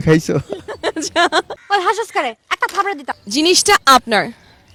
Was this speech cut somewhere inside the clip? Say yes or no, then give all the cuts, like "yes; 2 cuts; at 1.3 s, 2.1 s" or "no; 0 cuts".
no; 0 cuts